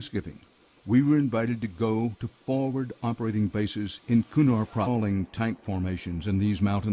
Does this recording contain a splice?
no; 0 cuts

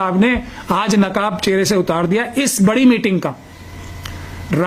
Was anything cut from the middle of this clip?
no; 0 cuts

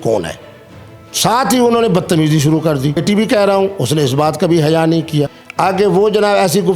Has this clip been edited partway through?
yes; 2 cuts; at 3.0 s, 5.4 s

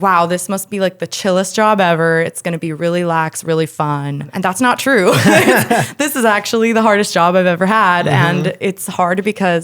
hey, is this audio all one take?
no; 1 cut; at 4.3 s

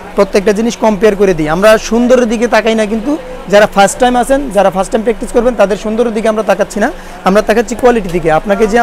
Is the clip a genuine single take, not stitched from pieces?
yes; 0 cuts

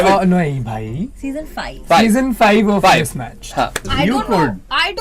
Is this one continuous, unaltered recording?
no; 1 cut; at 3.9 s

